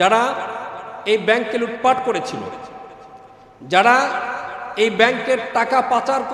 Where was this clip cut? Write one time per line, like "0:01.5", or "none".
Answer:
none